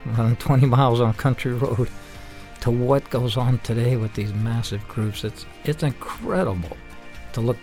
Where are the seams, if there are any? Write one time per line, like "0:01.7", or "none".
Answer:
none